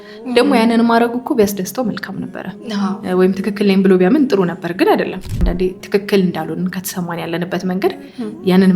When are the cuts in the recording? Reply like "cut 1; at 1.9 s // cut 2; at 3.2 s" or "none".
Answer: cut 1; at 5.3 s